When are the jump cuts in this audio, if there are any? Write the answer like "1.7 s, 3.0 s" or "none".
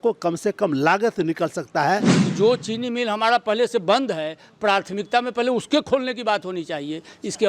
2.2 s